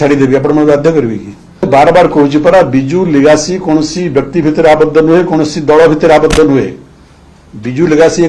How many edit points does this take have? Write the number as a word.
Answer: one